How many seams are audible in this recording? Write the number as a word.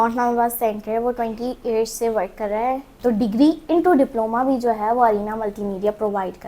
one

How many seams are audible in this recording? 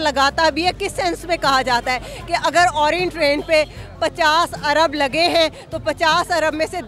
zero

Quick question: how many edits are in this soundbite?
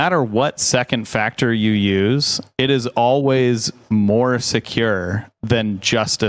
zero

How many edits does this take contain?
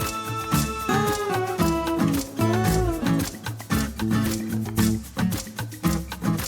zero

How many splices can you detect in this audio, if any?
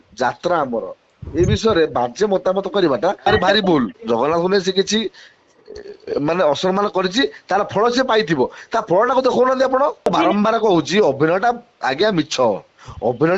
two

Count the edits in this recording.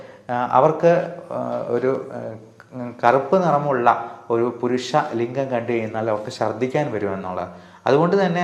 zero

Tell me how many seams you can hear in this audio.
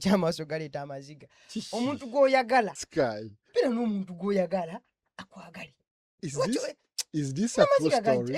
one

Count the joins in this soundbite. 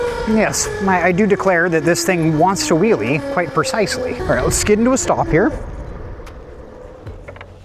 one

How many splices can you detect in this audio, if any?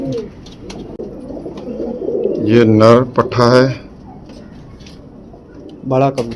one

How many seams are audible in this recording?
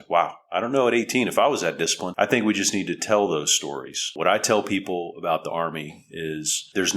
two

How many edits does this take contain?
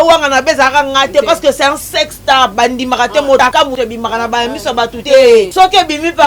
three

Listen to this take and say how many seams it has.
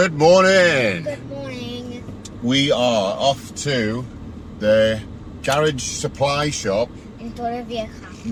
zero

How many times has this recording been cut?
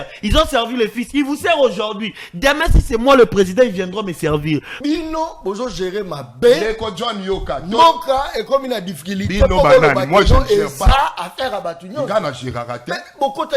one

